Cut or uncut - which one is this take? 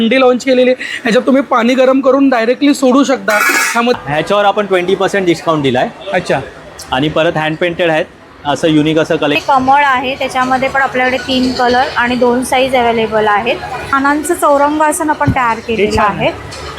cut